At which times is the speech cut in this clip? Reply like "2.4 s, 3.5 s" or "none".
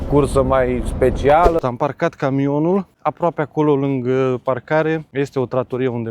1.6 s, 3.0 s, 5.1 s